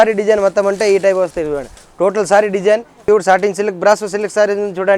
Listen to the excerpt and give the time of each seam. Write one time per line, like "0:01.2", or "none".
0:03.0

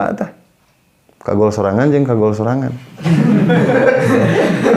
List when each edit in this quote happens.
none

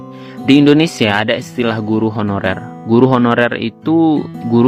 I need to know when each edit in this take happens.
none

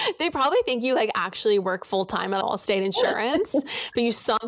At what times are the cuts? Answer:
0:02.4

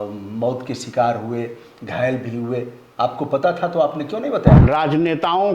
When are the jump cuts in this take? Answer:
0:04.6

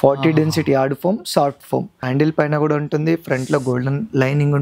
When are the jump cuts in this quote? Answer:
0:02.1

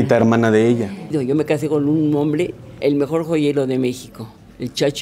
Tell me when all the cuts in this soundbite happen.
0:01.1
0:02.8

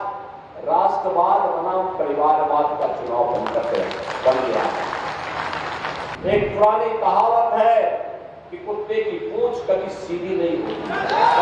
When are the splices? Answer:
0:06.0

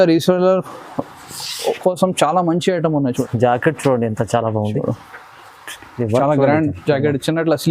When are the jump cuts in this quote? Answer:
0:03.2

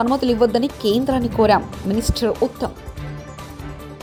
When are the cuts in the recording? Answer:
none

